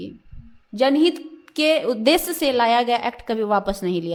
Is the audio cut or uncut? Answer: uncut